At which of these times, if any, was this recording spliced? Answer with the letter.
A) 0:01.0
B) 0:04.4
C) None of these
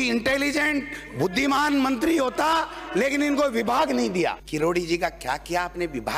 B